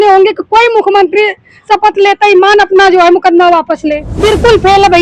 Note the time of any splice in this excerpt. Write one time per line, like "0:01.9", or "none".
0:04.1

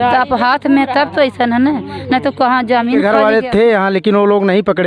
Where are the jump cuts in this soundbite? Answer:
0:03.0

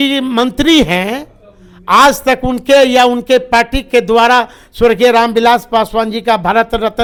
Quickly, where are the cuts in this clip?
none

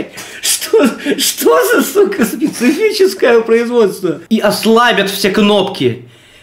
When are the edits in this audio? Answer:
0:04.2

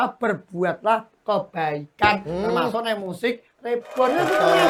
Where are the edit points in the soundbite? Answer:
none

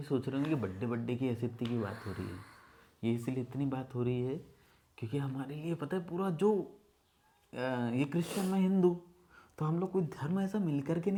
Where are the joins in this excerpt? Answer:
none

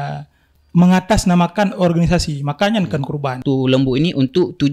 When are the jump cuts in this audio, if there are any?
0:03.4

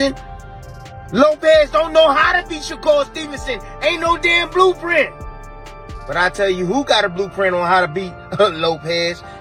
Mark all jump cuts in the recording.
none

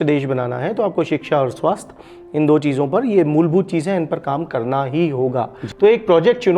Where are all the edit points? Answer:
0:05.6

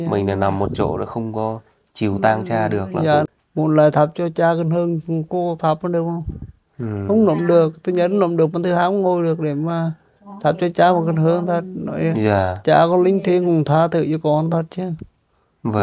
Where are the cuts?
0:03.3

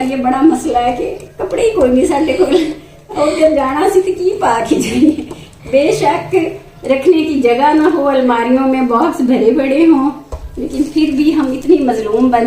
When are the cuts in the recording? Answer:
none

